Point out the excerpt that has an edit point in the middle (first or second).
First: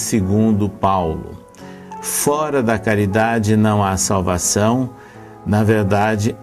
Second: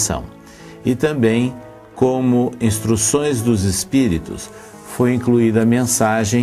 first